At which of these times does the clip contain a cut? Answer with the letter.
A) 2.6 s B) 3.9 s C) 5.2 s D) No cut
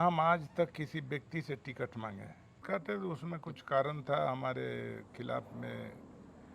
A